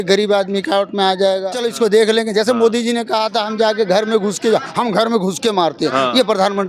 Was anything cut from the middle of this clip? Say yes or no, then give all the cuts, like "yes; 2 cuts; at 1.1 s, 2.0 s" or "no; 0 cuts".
yes; 1 cut; at 1.6 s